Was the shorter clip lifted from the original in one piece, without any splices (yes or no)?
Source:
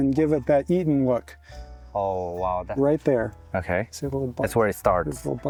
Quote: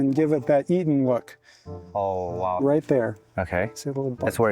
no